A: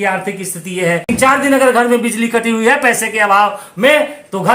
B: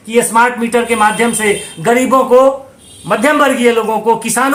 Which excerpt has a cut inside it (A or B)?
A